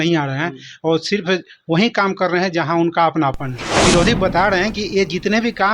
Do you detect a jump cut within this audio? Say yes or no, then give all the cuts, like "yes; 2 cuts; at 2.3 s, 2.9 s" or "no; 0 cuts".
yes; 1 cut; at 3.8 s